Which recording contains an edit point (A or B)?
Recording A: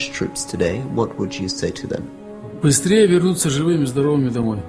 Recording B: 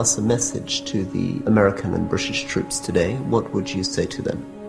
B